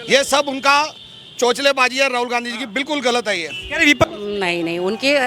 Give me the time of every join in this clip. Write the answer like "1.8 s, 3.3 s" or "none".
4.0 s